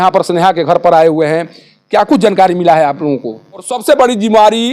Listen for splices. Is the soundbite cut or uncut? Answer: cut